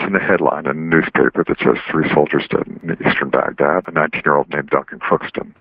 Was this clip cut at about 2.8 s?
yes; 2 cuts; at 2.8 s, 3.9 s

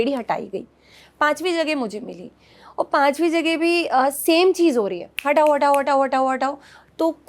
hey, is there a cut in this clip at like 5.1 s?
no; 0 cuts

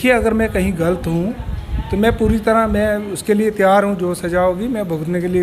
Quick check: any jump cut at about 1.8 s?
no; 0 cuts

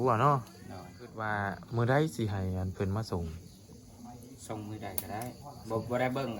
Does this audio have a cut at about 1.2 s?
yes; 1 cut; at 1.2 s

